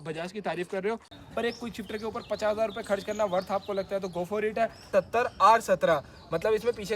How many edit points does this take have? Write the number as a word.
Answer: two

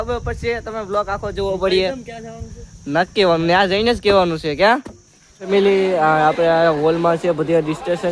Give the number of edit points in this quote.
one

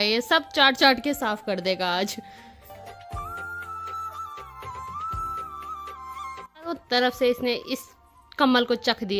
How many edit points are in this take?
zero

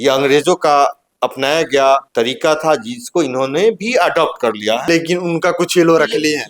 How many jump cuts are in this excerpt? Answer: three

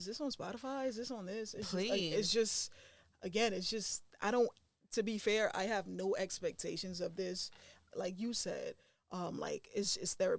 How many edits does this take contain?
one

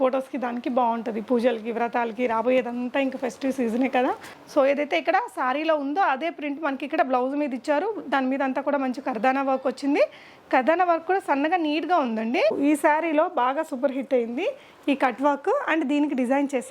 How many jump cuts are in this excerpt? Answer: two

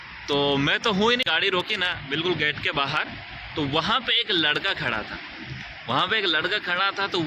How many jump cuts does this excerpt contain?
one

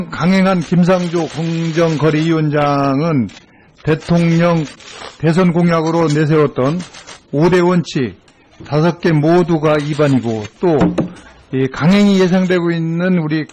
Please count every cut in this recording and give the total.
zero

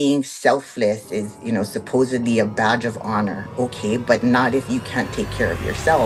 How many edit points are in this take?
zero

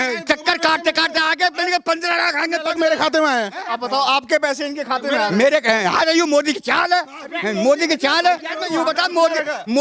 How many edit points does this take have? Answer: two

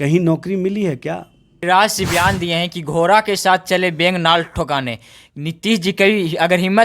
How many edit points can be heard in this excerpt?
one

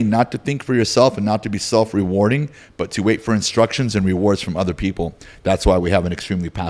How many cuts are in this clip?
zero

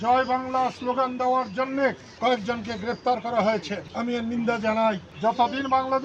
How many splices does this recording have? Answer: one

